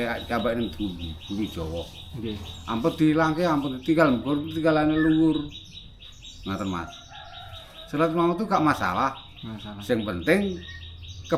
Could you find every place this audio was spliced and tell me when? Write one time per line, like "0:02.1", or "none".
none